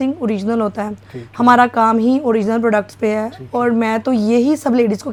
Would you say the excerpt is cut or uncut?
uncut